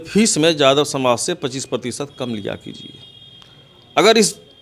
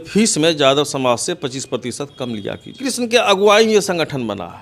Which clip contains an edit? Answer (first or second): second